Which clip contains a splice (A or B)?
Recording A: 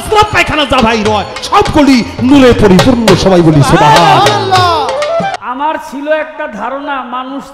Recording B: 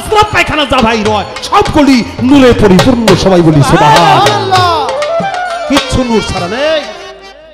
A